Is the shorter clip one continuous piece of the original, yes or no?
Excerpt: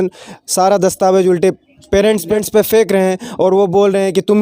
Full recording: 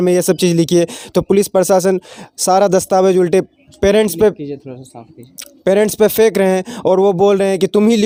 no